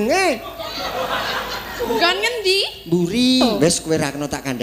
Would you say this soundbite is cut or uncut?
cut